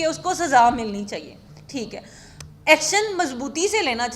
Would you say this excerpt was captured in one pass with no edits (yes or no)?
yes